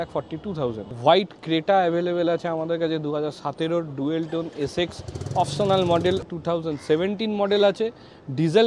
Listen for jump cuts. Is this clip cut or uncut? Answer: cut